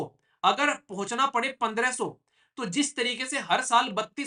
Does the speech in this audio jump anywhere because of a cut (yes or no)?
no